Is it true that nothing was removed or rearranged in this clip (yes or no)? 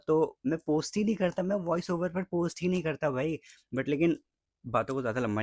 yes